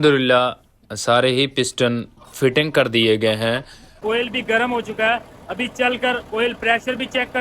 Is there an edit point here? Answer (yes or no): yes